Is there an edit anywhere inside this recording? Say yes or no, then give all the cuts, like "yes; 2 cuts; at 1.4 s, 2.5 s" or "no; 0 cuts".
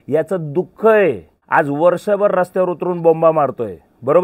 yes; 1 cut; at 1.4 s